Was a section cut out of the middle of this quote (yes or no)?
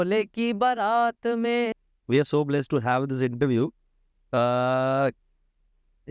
yes